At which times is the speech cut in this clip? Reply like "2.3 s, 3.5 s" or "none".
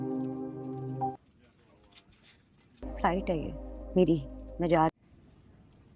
1.0 s